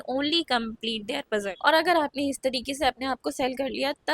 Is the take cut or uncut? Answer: cut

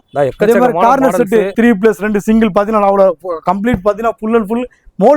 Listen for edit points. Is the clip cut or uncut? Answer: cut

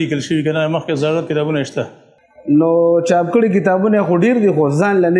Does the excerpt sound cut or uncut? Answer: uncut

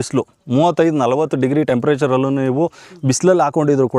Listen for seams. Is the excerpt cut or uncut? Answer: uncut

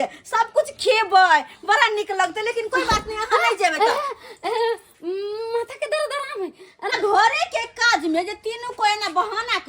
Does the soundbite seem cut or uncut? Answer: cut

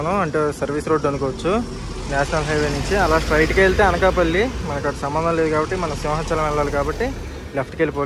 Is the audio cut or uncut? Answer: uncut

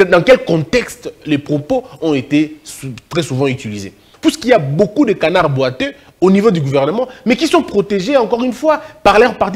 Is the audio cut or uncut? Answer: cut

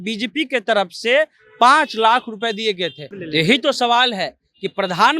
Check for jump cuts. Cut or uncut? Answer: cut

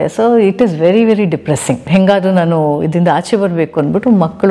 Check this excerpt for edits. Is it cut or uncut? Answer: cut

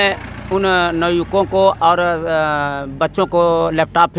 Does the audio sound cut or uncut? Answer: uncut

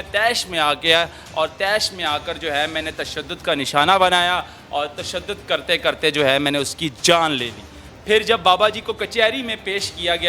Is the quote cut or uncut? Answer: cut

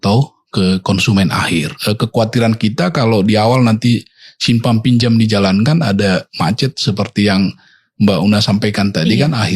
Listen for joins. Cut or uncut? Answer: cut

